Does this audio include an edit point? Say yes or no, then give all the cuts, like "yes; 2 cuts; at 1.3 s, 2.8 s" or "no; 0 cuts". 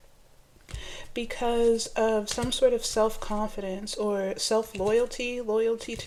no; 0 cuts